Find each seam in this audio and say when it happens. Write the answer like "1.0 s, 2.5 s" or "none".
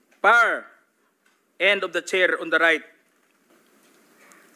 3.5 s